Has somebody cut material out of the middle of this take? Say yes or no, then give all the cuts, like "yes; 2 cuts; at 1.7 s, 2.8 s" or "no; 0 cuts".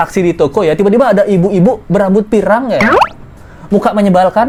no; 0 cuts